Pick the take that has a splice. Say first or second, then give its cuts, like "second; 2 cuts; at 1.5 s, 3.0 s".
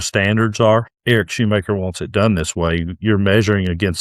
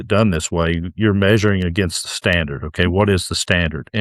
first; 1 cut; at 0.9 s